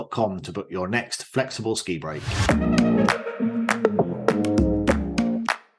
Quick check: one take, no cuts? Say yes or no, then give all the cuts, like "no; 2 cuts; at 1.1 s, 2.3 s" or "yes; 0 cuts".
no; 1 cut; at 2.3 s